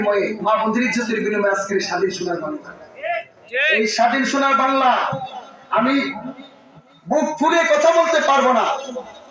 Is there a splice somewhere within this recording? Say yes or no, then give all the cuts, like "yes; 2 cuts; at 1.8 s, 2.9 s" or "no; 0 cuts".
no; 0 cuts